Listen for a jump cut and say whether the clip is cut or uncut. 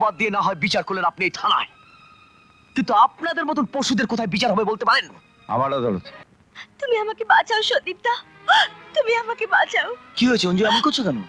uncut